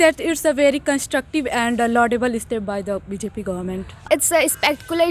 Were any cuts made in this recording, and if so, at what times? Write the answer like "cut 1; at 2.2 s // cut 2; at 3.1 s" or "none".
cut 1; at 4.0 s